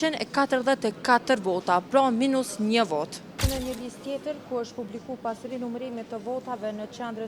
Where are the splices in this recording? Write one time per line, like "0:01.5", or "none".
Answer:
0:03.4